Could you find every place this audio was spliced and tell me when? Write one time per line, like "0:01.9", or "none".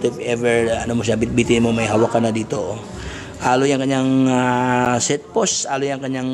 none